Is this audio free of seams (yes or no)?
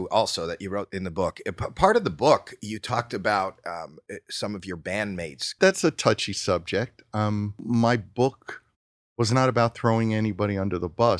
no